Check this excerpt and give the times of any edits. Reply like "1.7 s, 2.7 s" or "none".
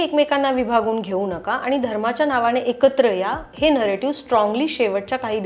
none